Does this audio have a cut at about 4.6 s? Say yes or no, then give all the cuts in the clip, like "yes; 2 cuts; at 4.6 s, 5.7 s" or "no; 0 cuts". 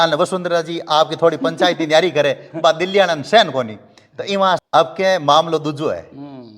yes; 1 cut; at 4.6 s